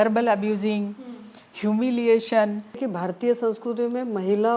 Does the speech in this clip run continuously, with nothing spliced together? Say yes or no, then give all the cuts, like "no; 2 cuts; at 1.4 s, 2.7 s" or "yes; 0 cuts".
no; 1 cut; at 2.9 s